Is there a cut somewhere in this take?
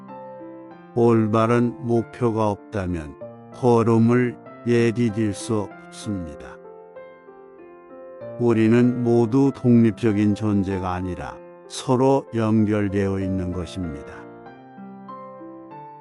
no; 0 cuts

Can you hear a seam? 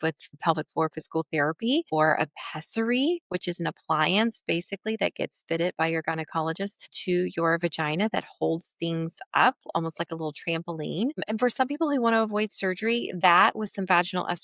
no; 0 cuts

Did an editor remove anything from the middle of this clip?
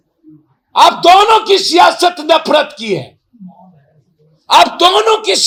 no; 0 cuts

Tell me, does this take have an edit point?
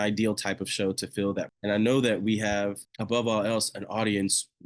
yes; 2 cuts; at 1.5 s, 2.9 s

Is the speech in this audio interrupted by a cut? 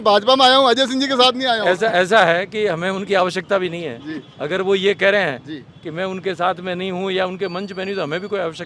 no; 0 cuts

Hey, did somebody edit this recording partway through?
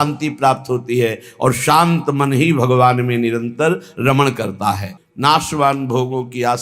no; 0 cuts

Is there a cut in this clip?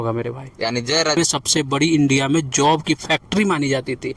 yes; 1 cut; at 1.2 s

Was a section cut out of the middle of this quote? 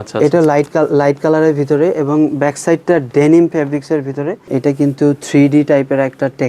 yes; 1 cut; at 4.5 s

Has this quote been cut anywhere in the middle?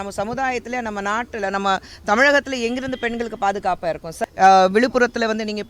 yes; 1 cut; at 4.2 s

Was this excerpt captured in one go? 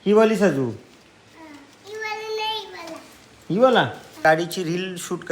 no; 1 cut; at 4.2 s

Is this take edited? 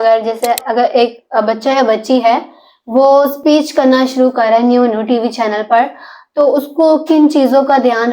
no; 0 cuts

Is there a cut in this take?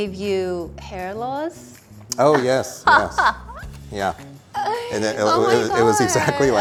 no; 0 cuts

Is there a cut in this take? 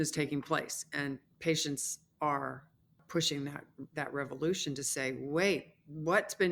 no; 0 cuts

